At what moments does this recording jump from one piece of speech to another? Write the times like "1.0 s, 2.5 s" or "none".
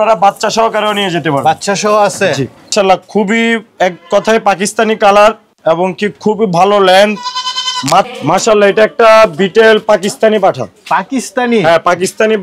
2.7 s, 8.1 s